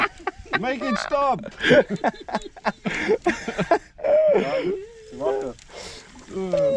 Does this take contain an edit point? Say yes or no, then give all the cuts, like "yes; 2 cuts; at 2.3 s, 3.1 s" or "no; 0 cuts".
no; 0 cuts